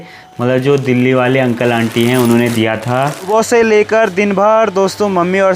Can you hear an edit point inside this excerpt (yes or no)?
yes